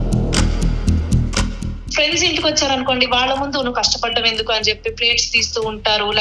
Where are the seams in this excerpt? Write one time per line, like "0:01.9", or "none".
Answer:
0:01.8